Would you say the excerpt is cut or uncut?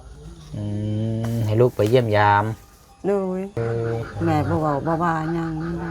cut